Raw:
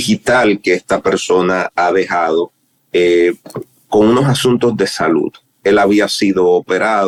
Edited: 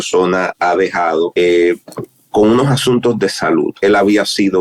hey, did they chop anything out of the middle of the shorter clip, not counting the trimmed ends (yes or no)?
yes